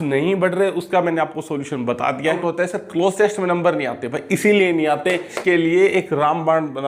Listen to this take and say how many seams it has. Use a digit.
2